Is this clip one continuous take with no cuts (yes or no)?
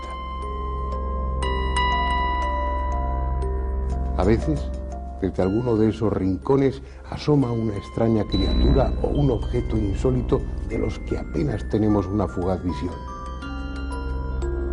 no